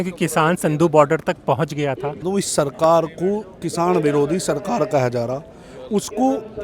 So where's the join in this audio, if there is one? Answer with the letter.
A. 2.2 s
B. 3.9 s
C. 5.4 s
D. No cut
A